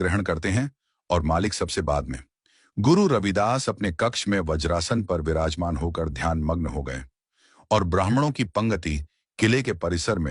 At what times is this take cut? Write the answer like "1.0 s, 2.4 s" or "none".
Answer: 3.3 s